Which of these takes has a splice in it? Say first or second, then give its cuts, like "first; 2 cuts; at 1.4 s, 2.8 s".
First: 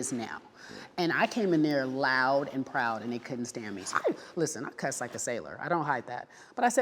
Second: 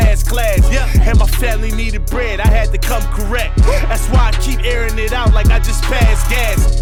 first; 1 cut; at 3.9 s